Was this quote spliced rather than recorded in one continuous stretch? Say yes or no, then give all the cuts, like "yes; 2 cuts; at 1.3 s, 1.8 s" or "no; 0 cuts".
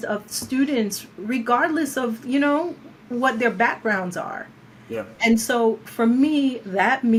no; 0 cuts